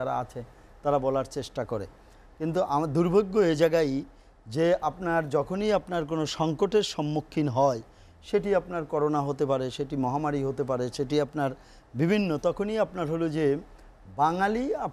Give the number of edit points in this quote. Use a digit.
0